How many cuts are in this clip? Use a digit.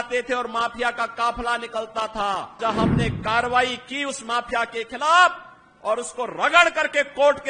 1